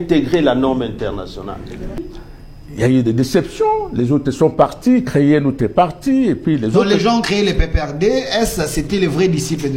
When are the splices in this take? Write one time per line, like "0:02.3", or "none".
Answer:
0:02.1